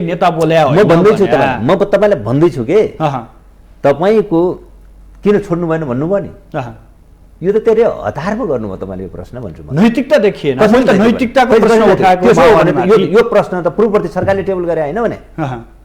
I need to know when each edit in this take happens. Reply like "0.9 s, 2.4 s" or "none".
none